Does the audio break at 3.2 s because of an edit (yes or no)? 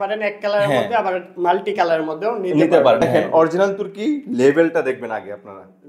yes